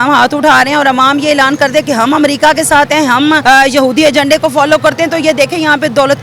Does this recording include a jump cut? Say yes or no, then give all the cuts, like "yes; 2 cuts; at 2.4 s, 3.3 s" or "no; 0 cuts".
yes; 1 cut; at 3.4 s